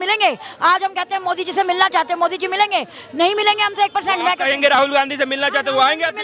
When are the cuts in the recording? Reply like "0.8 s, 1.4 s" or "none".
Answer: none